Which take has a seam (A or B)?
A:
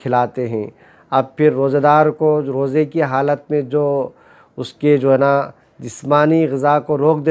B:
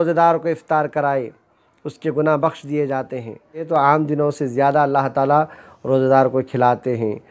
B